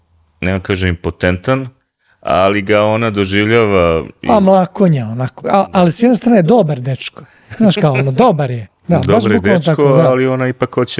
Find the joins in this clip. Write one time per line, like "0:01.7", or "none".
0:05.5
0:08.7